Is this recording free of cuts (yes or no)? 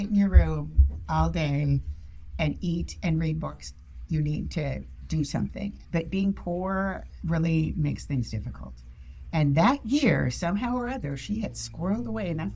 no